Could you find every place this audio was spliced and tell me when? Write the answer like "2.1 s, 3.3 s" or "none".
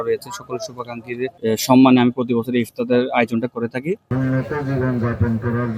1.4 s, 4.1 s